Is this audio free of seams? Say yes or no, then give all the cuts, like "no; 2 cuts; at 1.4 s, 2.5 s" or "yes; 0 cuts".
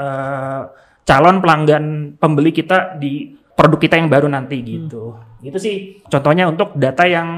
no; 2 cuts; at 3.4 s, 6.0 s